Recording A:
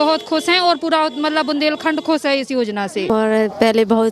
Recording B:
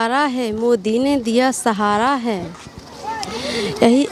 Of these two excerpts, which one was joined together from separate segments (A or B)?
A